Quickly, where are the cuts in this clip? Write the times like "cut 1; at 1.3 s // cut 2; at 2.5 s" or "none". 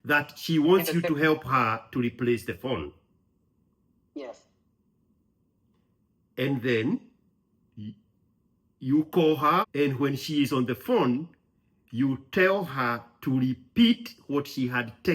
cut 1; at 9.7 s